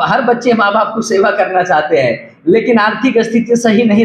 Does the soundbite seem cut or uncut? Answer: uncut